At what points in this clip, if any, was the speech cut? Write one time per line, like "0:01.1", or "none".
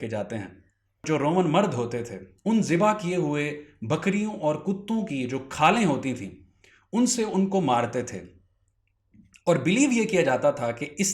0:01.0